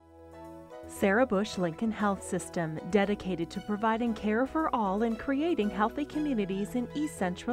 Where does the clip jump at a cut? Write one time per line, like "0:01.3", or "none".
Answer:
0:01.0